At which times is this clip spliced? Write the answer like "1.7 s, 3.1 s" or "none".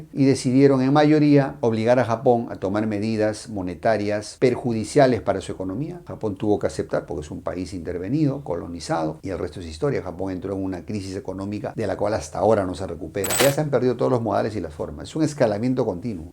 13.4 s